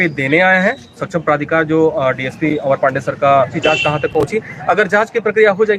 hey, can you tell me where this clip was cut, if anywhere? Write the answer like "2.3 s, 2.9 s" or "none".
3.5 s